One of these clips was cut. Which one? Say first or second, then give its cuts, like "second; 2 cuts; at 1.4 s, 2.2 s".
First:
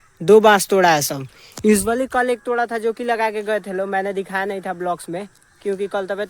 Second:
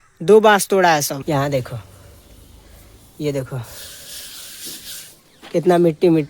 second; 1 cut; at 1.1 s